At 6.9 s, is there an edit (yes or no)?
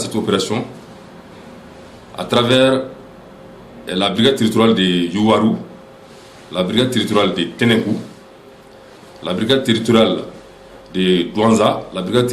yes